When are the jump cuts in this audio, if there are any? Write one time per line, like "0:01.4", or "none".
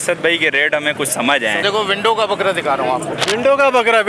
0:01.6

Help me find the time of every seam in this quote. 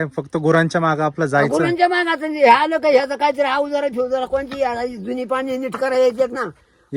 none

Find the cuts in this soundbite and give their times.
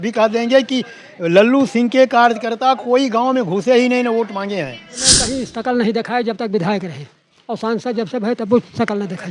0:05.0

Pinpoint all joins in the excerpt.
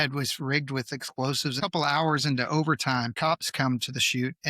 0:01.6
0:03.1

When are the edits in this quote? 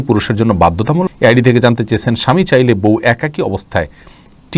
0:01.1

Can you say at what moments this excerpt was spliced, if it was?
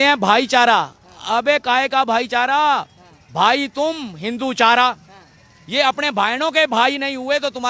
none

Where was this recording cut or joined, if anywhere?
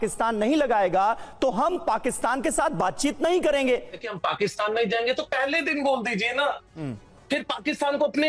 0:04.1

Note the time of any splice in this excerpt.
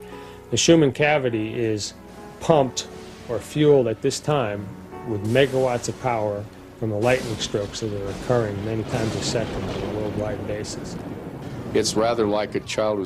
none

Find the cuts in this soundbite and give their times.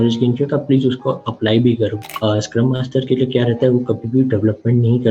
0:02.1

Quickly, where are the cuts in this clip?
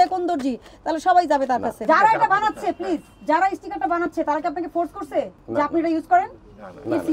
0:01.8

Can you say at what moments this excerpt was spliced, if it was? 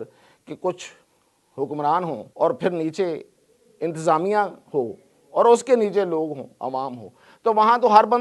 0:02.3

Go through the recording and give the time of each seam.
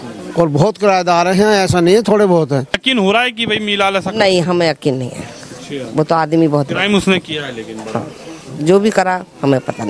0:02.8

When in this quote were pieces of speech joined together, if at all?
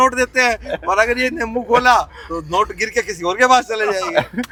none

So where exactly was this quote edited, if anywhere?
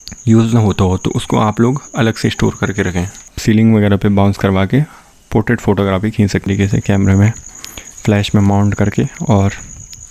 0:03.3
0:06.5

